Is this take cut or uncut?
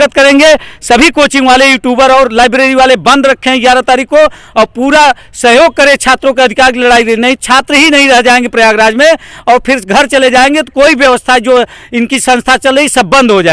uncut